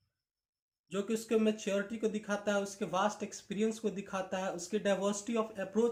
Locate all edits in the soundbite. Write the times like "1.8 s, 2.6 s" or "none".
none